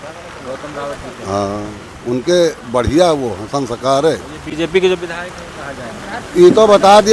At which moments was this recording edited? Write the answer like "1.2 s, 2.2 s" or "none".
none

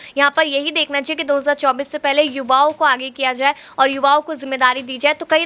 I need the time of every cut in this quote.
none

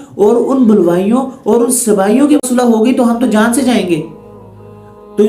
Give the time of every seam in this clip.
2.4 s

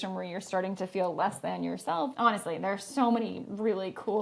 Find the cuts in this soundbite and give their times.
2.1 s

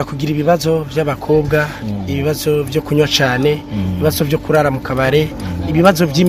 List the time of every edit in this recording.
none

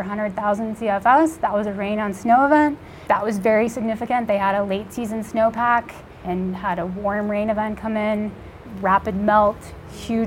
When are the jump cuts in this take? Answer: 2.9 s, 6.2 s, 8.6 s

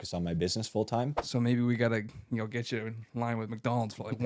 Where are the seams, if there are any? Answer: 1.2 s

